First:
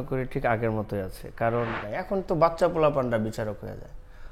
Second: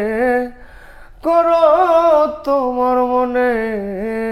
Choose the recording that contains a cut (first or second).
first